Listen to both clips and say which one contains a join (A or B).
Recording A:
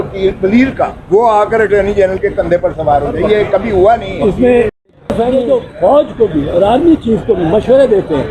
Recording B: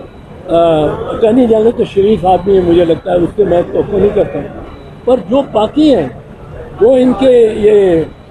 A